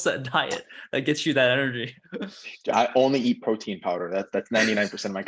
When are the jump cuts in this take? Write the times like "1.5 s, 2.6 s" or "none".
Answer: none